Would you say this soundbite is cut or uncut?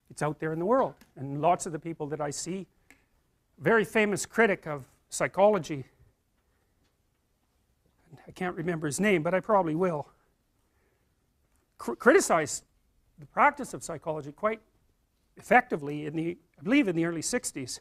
uncut